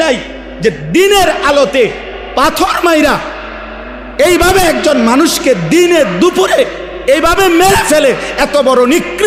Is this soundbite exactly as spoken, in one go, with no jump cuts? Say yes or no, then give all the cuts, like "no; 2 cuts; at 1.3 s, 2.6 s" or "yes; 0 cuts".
yes; 0 cuts